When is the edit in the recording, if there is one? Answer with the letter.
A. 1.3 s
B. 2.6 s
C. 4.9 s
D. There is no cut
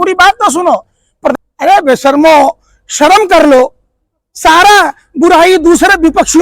A